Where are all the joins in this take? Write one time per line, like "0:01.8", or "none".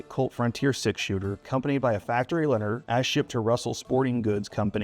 0:01.4
0:02.8